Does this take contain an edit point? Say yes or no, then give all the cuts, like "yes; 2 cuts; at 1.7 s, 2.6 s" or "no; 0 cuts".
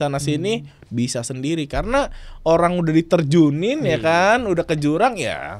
no; 0 cuts